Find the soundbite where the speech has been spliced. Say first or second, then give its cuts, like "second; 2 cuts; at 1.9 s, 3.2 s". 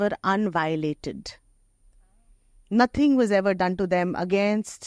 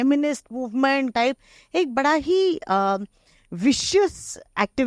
second; 1 cut; at 1.1 s